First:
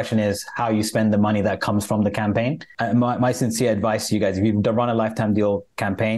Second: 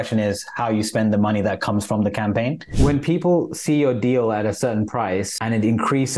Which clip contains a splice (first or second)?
second